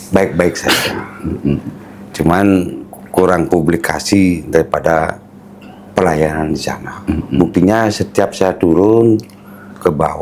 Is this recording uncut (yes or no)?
yes